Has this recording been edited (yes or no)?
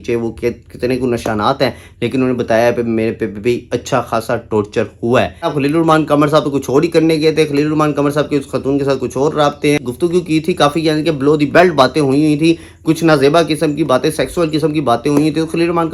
yes